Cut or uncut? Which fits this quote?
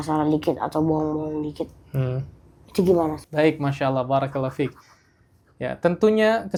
uncut